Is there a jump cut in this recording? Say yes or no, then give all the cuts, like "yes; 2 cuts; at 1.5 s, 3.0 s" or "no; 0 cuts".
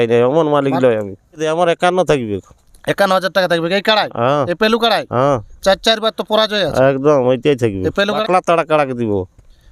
yes; 2 cuts; at 1.4 s, 8.2 s